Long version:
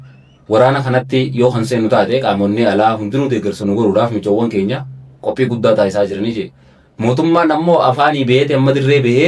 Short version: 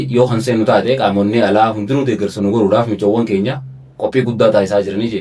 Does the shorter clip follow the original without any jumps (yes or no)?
yes